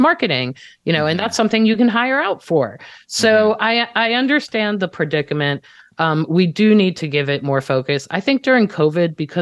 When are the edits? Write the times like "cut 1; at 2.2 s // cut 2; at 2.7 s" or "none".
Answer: none